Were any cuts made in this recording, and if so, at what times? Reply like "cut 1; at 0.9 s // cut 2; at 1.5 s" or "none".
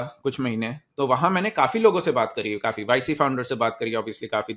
none